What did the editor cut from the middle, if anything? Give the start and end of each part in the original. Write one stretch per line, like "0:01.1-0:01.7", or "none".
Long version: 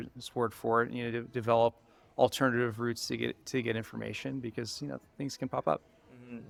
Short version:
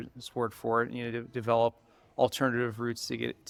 none